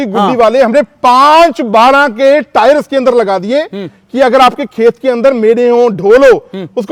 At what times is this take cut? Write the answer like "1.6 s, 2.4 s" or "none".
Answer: none